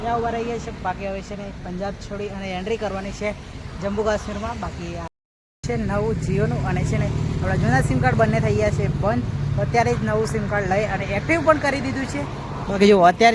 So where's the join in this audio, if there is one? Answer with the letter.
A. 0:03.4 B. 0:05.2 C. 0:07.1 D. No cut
B